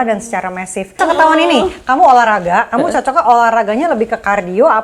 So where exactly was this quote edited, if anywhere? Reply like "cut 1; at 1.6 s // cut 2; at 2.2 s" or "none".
cut 1; at 1.0 s